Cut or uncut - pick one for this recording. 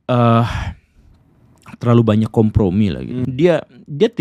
cut